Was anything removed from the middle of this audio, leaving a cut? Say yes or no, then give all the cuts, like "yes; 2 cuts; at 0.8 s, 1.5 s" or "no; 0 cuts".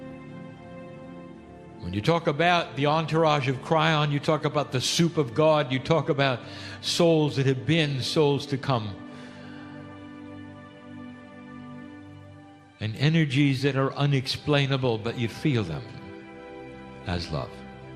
yes; 1 cut; at 15.2 s